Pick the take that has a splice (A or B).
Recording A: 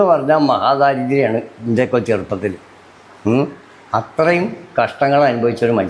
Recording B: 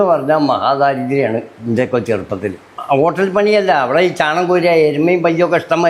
B